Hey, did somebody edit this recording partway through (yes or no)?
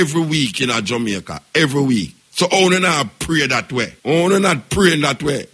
yes